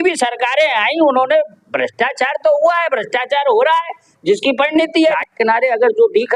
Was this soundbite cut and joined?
yes; 1 cut; at 5.0 s

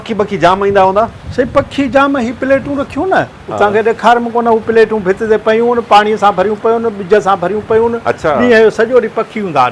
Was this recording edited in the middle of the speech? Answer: no; 0 cuts

